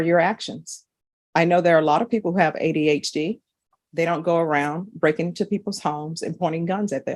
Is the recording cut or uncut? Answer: uncut